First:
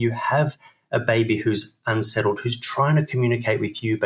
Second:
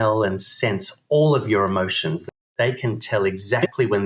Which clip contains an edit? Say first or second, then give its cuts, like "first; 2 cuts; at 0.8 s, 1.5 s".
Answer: second; 1 cut; at 2.4 s